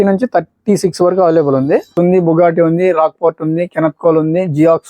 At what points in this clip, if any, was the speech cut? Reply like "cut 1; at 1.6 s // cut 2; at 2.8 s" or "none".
cut 1; at 1.9 s